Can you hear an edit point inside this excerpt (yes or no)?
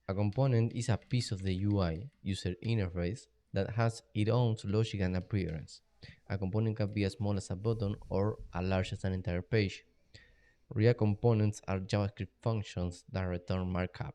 yes